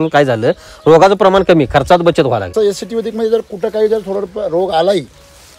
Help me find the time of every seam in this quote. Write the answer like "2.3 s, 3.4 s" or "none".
2.5 s